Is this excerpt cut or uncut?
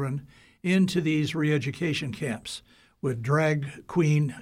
uncut